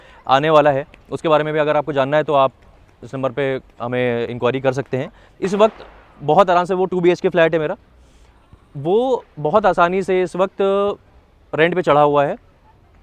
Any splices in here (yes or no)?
yes